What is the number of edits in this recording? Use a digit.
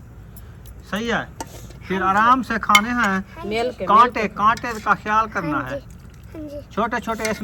0